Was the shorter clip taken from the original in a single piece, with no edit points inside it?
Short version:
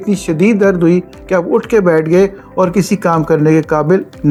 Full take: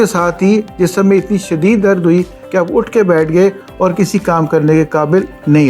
yes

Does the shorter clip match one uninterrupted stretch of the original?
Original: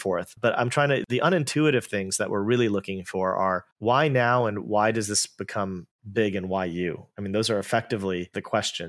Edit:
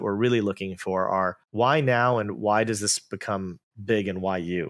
yes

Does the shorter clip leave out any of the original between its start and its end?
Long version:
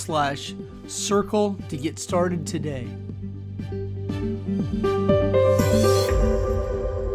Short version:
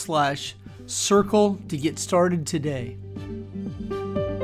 yes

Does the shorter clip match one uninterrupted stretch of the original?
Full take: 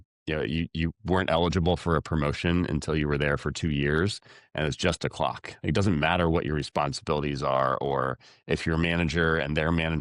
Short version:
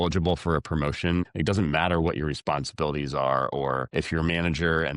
no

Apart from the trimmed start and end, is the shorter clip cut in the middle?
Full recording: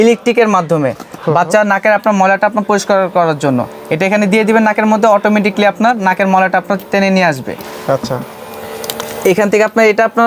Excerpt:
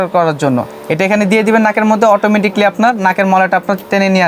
no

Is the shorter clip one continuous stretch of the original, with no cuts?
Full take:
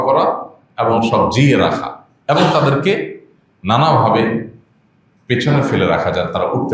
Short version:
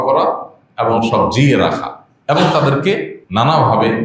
no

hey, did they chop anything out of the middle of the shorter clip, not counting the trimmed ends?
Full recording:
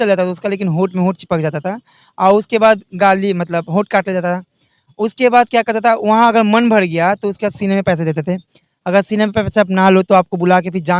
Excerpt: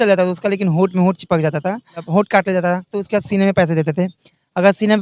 yes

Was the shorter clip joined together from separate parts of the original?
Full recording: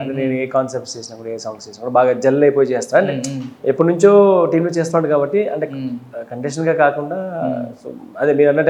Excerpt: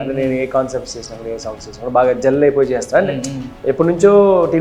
no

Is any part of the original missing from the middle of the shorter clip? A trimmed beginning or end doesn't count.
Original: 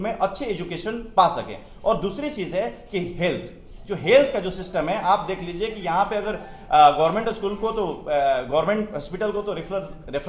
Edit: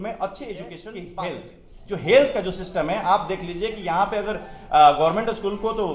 yes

